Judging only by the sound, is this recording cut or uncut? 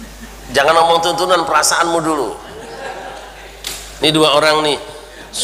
cut